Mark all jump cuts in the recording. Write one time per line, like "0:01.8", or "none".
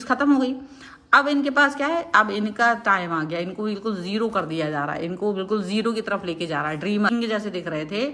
0:07.1